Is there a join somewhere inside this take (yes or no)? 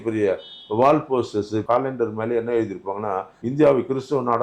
yes